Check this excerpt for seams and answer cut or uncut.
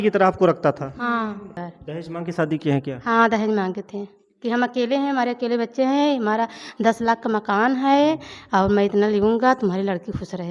cut